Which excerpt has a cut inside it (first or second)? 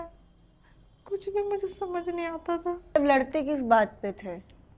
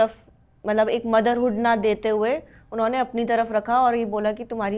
first